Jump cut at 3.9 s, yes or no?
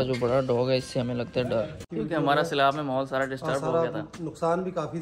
no